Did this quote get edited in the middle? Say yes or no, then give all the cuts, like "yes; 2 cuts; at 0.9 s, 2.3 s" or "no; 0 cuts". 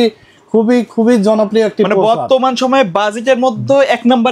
no; 0 cuts